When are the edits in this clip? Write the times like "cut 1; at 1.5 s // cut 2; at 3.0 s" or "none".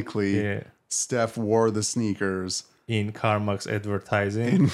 none